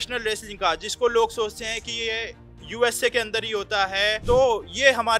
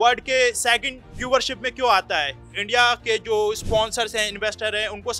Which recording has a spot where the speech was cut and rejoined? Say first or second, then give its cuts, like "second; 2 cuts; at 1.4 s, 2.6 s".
second; 1 cut; at 2.3 s